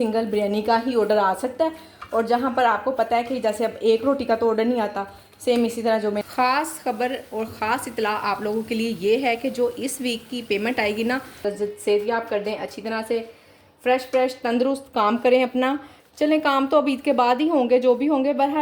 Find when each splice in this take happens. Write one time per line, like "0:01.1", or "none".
0:06.2
0:11.4